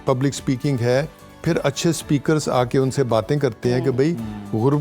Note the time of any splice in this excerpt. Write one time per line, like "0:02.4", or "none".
none